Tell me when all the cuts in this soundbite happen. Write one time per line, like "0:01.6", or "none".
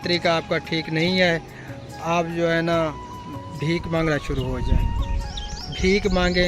none